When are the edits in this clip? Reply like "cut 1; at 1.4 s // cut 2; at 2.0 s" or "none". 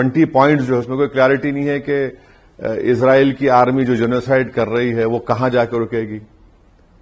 none